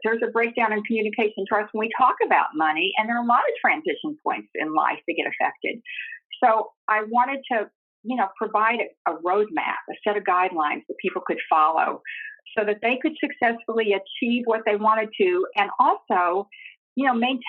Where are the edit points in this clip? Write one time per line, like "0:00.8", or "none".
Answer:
none

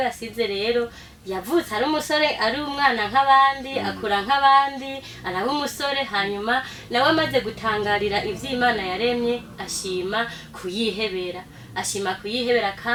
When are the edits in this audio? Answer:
none

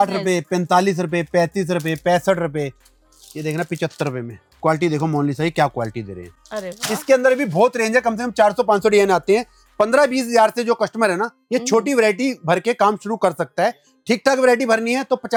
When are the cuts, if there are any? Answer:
none

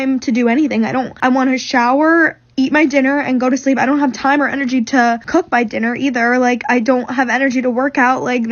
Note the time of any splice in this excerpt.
0:01.1
0:05.2

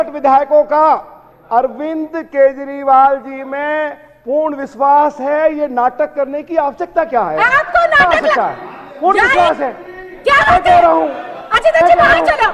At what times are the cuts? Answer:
none

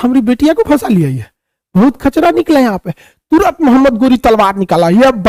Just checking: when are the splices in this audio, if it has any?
none

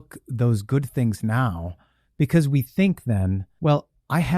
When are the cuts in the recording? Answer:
0:03.5

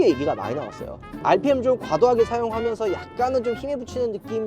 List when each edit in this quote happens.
0:01.1

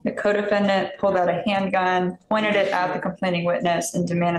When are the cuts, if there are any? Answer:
none

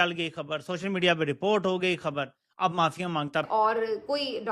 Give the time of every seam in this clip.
0:03.5

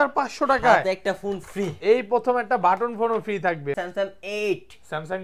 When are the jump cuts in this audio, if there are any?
0:03.8

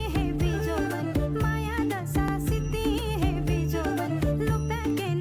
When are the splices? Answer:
none

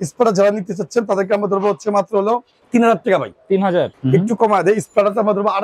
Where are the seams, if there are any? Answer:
0:02.5
0:03.9

